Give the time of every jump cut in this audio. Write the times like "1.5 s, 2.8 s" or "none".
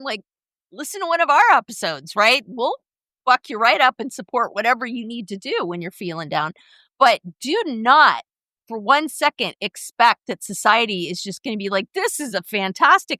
none